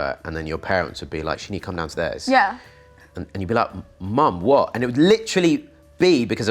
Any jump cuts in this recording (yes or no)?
no